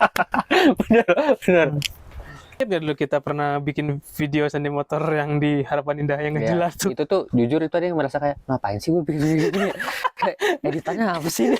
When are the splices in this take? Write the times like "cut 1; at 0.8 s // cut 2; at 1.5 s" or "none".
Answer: cut 1; at 2.6 s